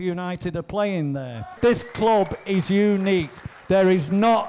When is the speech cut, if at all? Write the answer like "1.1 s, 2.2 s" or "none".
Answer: 1.5 s